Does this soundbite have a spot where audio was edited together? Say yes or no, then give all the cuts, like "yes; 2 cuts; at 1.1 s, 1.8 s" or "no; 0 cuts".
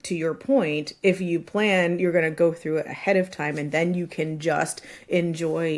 no; 0 cuts